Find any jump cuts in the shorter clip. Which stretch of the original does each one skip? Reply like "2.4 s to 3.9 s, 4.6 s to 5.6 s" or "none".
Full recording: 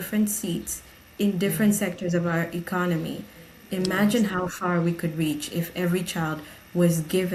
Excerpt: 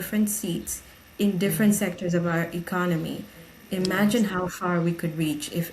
none